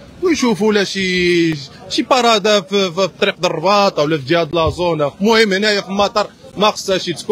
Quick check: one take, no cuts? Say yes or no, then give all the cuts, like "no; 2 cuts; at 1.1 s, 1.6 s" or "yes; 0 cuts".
yes; 0 cuts